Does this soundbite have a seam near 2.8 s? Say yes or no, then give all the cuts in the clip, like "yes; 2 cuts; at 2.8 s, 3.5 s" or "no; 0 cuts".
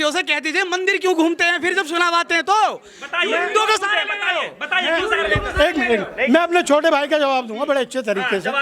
no; 0 cuts